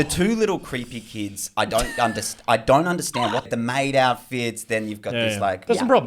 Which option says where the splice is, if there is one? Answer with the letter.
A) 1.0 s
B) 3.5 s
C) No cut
B